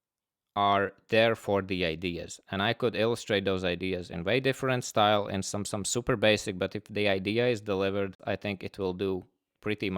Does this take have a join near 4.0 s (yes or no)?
no